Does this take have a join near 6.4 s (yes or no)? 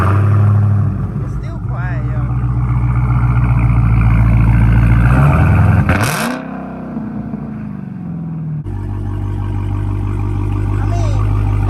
no